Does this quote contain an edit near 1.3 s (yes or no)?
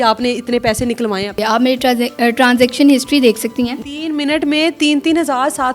yes